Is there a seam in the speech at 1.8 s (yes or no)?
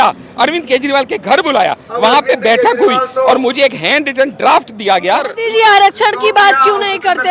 no